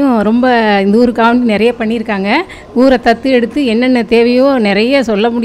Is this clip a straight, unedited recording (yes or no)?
yes